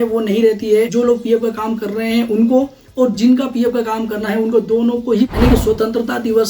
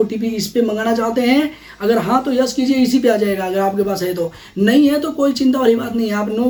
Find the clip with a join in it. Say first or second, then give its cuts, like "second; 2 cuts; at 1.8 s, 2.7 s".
first; 2 cuts; at 0.9 s, 5.3 s